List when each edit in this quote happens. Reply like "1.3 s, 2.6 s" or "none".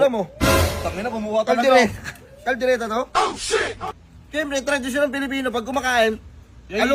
3.8 s